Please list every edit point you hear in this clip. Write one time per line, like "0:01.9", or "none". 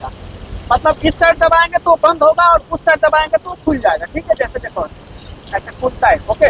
none

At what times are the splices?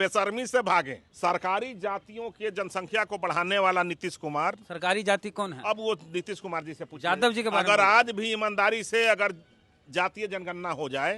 0:01.0

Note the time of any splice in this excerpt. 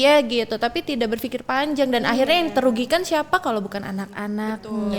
none

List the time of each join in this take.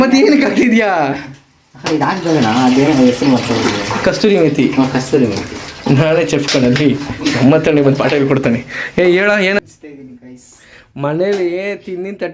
0:09.6

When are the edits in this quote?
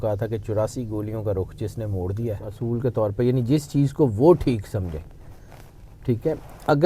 0:02.5

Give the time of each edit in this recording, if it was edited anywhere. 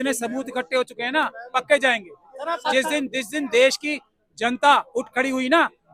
none

